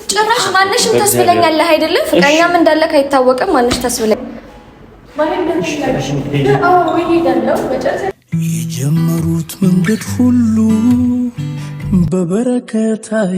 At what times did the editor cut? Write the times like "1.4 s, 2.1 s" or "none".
4.2 s